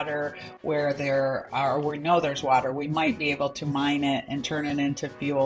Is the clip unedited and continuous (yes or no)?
yes